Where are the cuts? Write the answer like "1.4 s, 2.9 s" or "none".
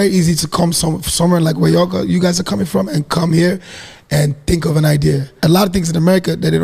5.4 s